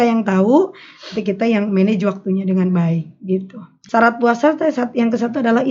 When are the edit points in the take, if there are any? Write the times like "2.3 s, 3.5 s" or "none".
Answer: 3.7 s